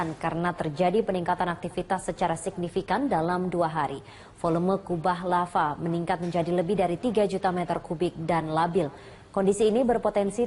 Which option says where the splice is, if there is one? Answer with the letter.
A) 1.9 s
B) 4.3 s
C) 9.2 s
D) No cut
B